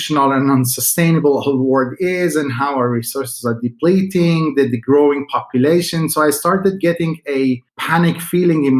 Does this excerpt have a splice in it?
yes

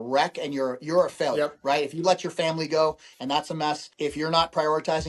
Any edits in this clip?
yes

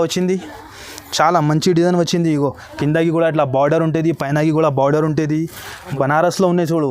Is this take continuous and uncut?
no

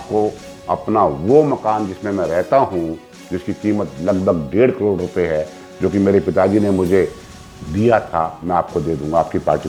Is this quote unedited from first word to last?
yes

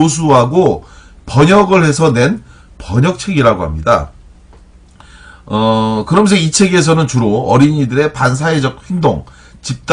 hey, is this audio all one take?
yes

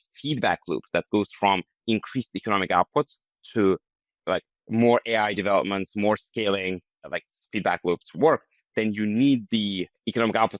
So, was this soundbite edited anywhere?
no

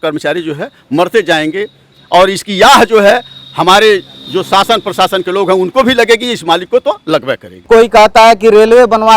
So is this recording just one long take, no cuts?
no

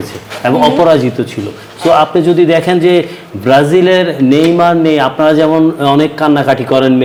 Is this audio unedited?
yes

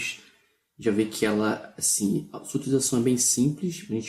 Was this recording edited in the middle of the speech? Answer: yes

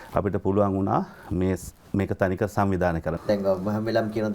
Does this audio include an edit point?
yes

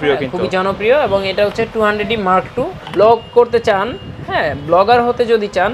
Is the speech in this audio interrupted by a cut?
yes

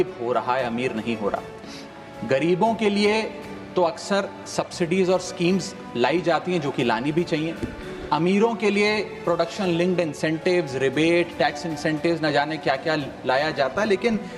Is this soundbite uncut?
yes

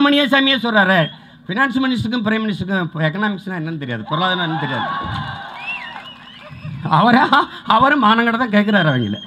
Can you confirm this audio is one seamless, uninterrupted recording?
yes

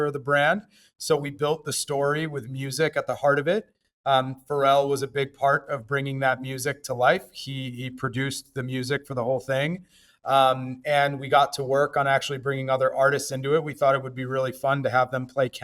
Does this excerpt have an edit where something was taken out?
no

